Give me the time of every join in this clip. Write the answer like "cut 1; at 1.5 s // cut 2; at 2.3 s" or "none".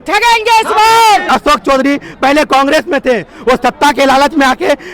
cut 1; at 1.3 s

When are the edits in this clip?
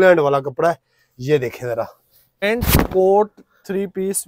cut 1; at 2.4 s

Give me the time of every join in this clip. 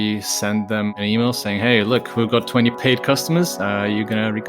cut 1; at 0.9 s // cut 2; at 2.8 s

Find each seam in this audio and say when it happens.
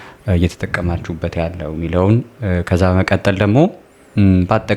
none

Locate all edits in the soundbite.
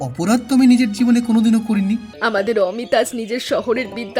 cut 1; at 2.1 s

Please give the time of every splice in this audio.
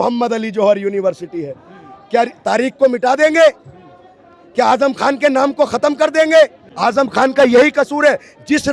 cut 1; at 6.6 s

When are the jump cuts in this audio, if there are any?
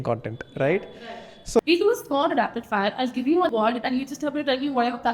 cut 1; at 1.6 s // cut 2; at 3.5 s

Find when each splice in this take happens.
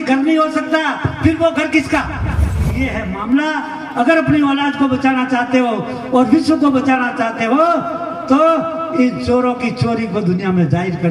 cut 1; at 2.7 s

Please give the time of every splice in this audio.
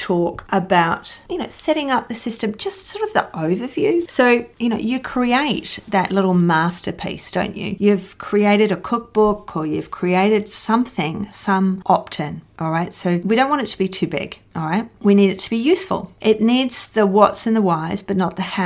none

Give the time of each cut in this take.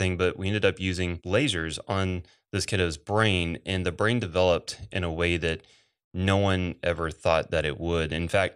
cut 1; at 1.2 s

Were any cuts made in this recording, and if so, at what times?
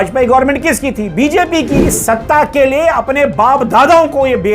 cut 1; at 1.9 s

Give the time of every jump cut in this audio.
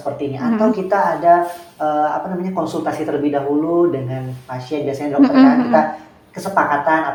none

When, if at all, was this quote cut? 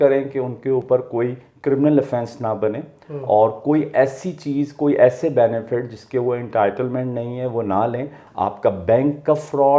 cut 1; at 8.2 s

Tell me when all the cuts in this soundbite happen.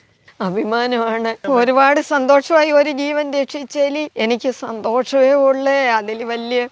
cut 1; at 1.4 s // cut 2; at 4.1 s

